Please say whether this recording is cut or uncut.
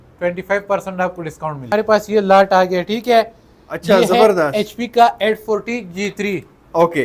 cut